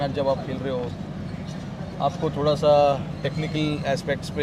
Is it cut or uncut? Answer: uncut